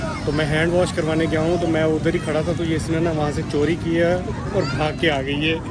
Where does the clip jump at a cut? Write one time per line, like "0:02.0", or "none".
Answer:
none